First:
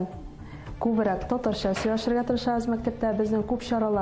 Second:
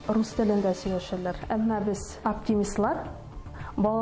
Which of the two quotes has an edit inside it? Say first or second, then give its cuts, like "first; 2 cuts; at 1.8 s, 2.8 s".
second; 1 cut; at 1.6 s